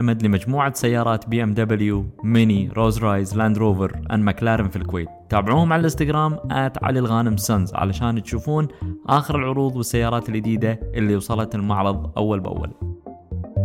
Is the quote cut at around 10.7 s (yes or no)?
no